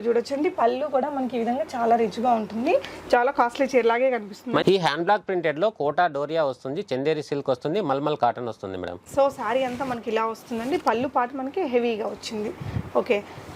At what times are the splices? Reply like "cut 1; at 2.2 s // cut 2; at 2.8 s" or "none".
cut 1; at 4.6 s // cut 2; at 9.0 s